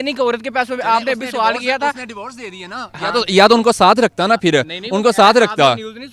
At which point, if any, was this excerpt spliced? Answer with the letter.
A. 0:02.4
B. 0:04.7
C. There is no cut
C